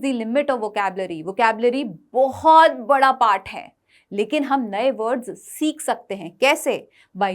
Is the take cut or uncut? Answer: uncut